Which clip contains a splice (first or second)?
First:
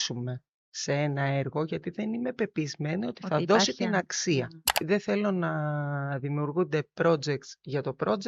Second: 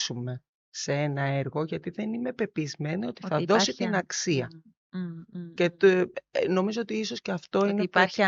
first